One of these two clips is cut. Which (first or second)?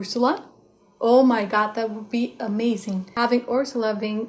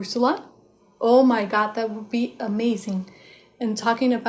first